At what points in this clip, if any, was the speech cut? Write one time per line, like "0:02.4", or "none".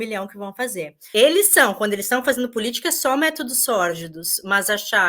0:01.0

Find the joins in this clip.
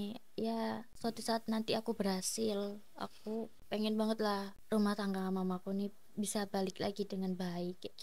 0:00.9
0:03.6
0:04.5

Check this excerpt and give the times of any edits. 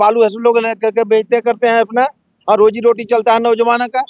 none

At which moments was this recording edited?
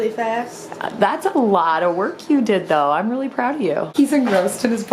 0:03.9

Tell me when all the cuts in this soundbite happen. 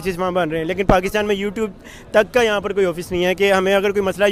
none

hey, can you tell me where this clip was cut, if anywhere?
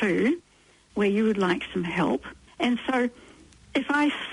0:02.4

